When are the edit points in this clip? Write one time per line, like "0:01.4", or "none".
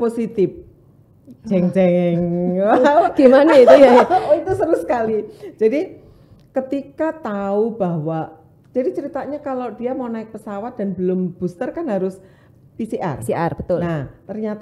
none